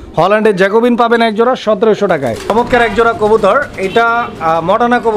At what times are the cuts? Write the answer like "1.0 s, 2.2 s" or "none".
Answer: 2.5 s

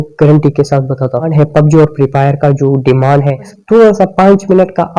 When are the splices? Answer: 1.3 s, 3.6 s

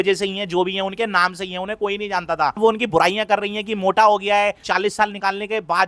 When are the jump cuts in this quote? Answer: 2.6 s, 4.6 s

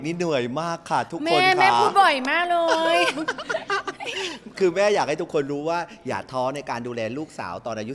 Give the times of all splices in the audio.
none

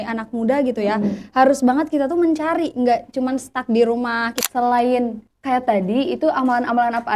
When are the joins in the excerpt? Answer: 4.4 s, 5.3 s

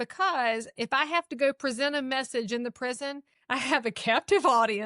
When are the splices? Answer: 3.3 s

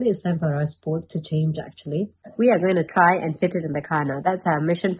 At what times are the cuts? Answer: 2.2 s

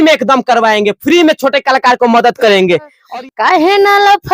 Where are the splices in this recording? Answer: 3.0 s

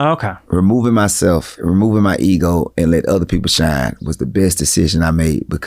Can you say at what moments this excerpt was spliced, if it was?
1.5 s

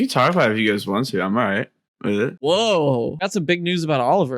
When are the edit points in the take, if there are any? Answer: 2.4 s, 3.3 s

